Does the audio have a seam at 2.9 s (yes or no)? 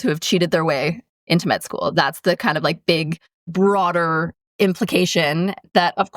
no